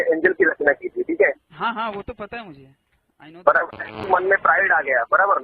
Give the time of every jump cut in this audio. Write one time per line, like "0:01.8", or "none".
0:04.0

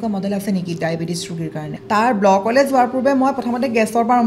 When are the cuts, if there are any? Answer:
0:01.7

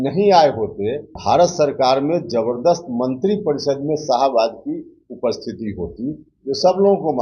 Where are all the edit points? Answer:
0:01.1

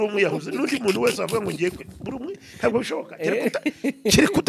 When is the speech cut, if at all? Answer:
none

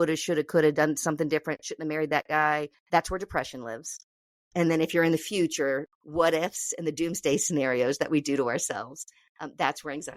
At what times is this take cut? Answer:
0:02.8
0:05.9

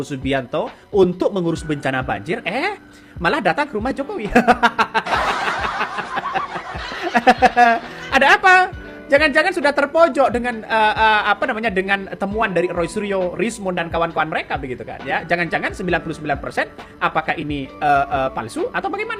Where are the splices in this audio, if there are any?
none

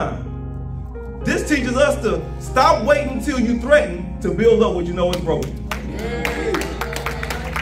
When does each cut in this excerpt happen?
none

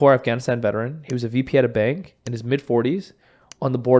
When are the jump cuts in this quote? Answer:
none

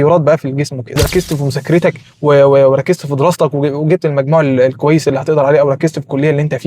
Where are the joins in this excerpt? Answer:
0:01.0

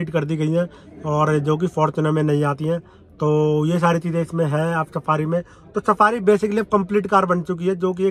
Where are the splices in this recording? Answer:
none

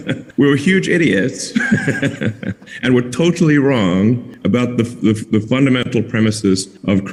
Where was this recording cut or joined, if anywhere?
none

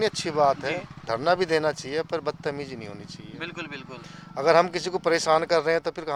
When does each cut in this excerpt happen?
none

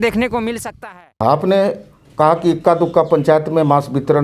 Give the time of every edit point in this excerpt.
0:01.1

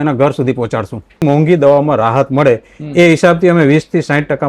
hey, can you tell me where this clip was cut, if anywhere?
0:01.2

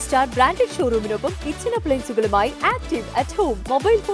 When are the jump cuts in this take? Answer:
none

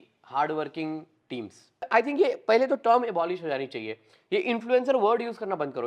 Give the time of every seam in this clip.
0:01.9

